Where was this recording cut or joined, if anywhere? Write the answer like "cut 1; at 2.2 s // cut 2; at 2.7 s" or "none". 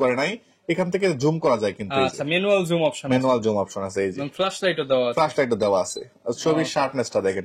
none